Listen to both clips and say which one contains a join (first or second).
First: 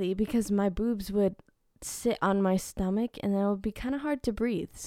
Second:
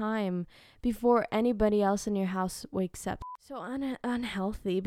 second